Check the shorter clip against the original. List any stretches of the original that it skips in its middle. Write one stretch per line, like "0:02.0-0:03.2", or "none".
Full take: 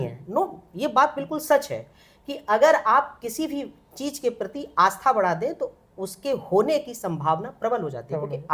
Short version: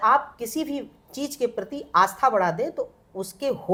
none

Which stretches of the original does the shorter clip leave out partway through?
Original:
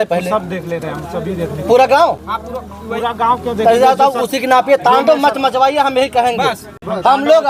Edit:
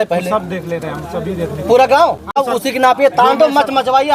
0:02.6-0:04.2

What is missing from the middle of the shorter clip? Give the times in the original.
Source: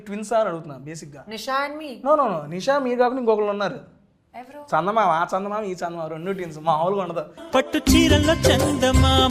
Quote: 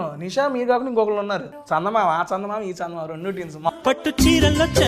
0:03.8-0:04.5
0:06.7-0:07.4

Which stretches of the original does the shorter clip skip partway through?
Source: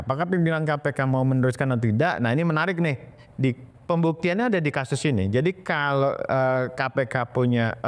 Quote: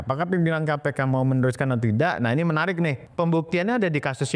0:03.0-0:03.7

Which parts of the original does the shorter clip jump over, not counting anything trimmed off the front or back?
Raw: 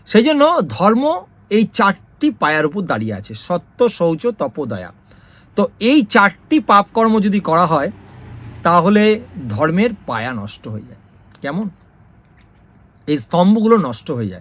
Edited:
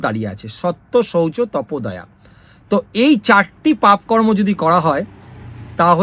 none

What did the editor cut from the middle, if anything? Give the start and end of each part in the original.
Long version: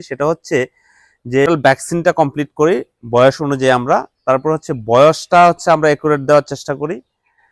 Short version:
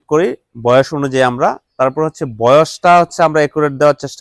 none

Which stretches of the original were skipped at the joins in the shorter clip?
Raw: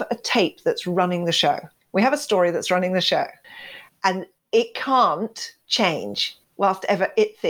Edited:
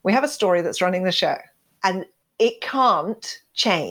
0:03.9-0:04.2

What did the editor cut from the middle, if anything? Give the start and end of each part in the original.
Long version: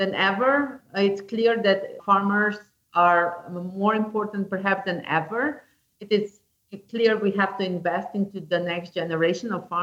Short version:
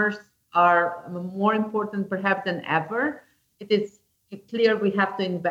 none

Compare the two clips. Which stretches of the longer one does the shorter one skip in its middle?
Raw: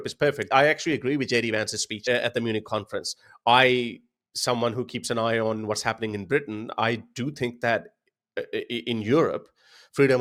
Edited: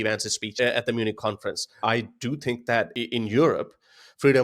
0:03.2-0:06.6
0:07.9-0:08.7

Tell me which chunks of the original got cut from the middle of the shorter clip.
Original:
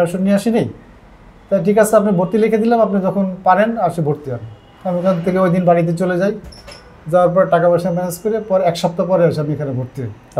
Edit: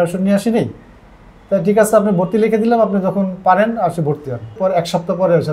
0:04.5-0:08.4

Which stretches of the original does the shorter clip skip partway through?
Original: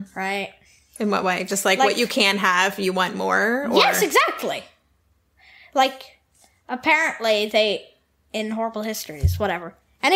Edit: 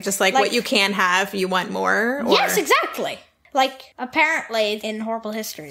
0:04.8-0:05.5
0:06.1-0:06.6
0:07.5-0:08.3

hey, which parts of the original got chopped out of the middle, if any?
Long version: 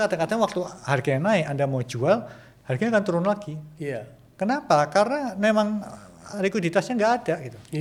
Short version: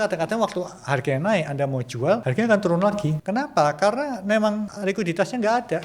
0:02.3-0:02.7
0:03.6-0:04.3
0:05.9-0:06.3

